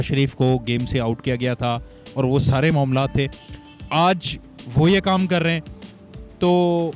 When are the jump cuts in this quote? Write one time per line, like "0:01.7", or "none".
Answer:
none